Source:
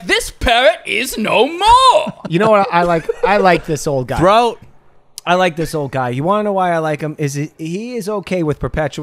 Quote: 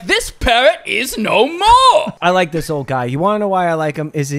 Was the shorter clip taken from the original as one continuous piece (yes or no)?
no